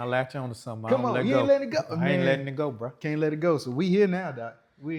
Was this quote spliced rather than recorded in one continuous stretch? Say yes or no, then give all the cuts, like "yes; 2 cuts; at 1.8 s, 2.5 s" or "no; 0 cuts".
no; 0 cuts